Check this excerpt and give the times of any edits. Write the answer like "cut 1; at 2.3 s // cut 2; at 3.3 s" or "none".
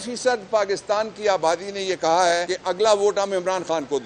cut 1; at 2.5 s